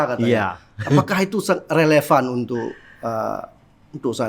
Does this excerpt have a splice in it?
no; 0 cuts

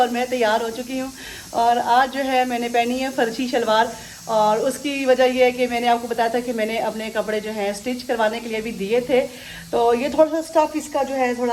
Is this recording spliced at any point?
no; 0 cuts

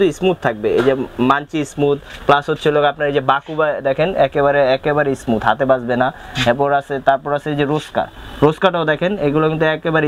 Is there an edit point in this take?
no; 0 cuts

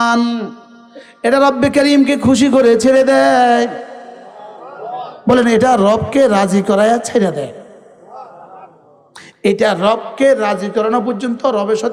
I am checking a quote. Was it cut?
no; 0 cuts

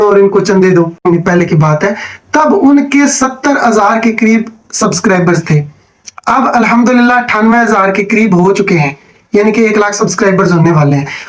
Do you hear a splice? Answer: yes; 1 cut; at 1.0 s

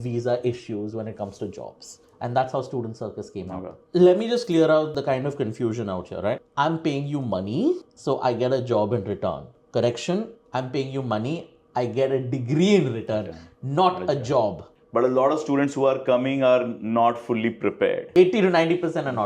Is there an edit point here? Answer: yes; 5 cuts; at 3.6 s, 4.9 s, 6.5 s, 14.7 s, 18.0 s

